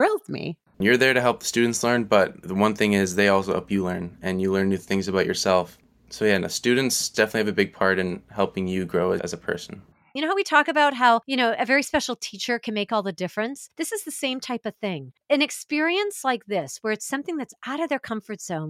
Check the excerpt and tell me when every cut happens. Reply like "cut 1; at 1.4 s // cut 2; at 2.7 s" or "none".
cut 1; at 0.7 s // cut 2; at 2.4 s // cut 3; at 5.8 s // cut 4; at 7.1 s // cut 5; at 10.1 s